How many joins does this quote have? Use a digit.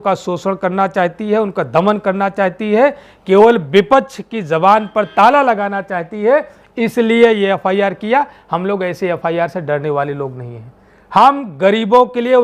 0